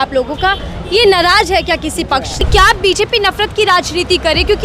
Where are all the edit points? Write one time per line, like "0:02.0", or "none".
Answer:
0:02.4